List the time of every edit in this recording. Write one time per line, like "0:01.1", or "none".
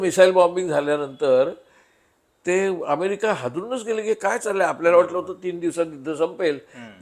none